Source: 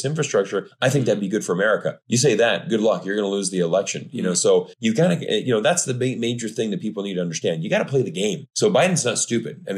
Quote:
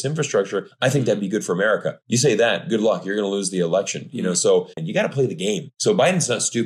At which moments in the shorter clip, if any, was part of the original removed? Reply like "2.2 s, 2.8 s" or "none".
4.8 s